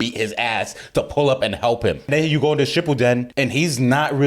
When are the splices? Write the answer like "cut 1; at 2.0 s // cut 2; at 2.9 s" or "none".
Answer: cut 1; at 2.1 s // cut 2; at 3.3 s